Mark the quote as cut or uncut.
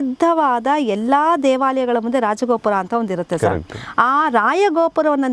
uncut